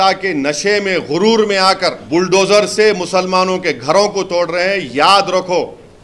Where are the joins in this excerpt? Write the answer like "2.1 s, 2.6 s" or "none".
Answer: 2.0 s